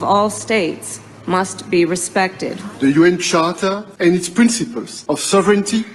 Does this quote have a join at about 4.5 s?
no; 1 cut; at 2.9 s

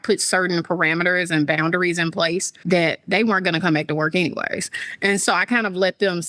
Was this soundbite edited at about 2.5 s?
yes; 1 cut; at 2.5 s

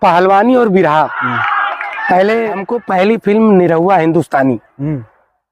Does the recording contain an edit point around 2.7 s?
yes; 1 cut; at 2.7 s

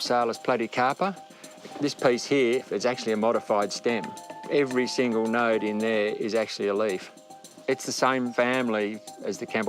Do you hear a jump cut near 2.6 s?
yes; 1 cut; at 2.6 s

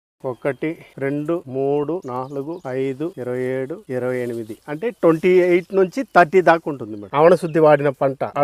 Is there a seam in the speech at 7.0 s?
yes; 2 cuts; at 3.2 s, 7.0 s

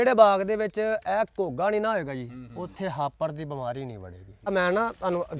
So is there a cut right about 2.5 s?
no; 1 cut; at 4.5 s

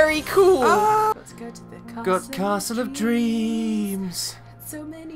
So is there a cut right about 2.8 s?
no; 1 cut; at 1.1 s

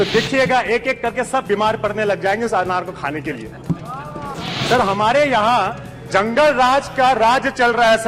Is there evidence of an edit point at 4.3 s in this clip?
yes; 1 cut; at 4.3 s

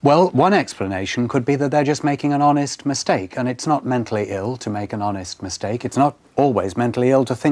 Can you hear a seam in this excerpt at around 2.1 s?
no; 1 cut; at 5.3 s

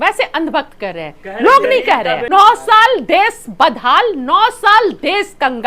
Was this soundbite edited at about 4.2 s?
no; 1 cut; at 2.3 s

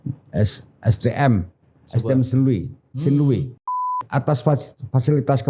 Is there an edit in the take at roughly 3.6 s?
yes; 1 cut; at 3.6 s

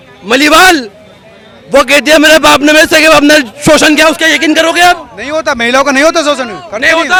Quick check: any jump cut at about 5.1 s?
no; 0 cuts

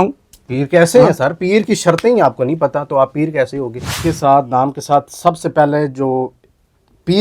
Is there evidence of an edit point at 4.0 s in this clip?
yes; 1 cut; at 4.0 s

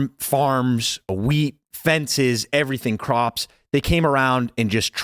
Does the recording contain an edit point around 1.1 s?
yes; 1 cut; at 1.1 s

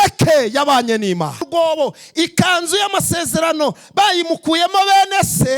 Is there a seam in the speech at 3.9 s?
no; 1 cut; at 1.5 s

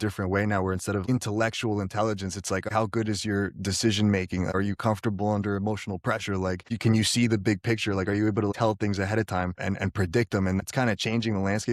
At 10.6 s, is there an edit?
yes; 4 cuts; at 1.0 s, 2.7 s, 9.6 s, 10.6 s

